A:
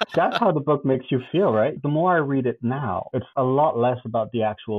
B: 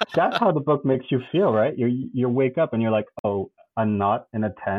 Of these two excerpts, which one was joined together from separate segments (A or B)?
A